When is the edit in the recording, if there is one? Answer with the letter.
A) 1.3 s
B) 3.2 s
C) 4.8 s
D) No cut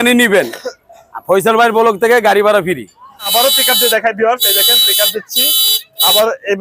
B